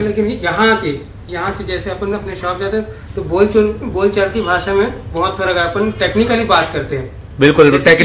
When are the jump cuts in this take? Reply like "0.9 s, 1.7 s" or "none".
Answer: none